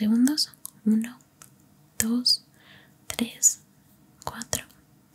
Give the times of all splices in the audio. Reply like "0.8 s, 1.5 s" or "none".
none

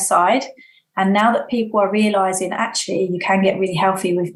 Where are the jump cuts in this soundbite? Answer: none

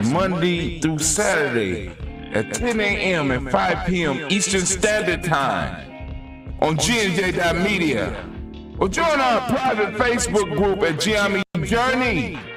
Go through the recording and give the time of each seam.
none

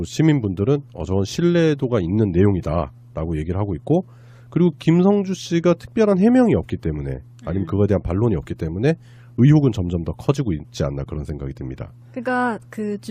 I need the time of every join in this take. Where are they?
9.3 s

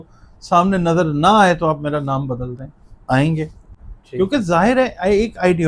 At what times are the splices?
none

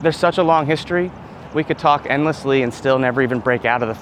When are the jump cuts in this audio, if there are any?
none

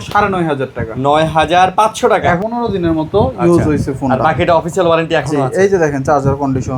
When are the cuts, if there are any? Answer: 2.4 s

